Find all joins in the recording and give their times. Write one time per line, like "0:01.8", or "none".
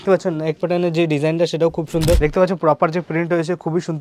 0:02.2